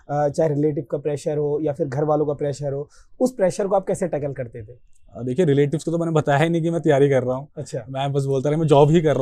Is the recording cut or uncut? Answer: uncut